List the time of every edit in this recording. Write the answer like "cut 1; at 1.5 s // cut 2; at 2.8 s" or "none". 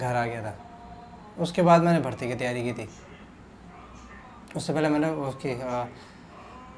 none